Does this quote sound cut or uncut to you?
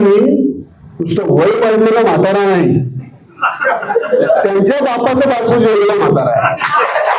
uncut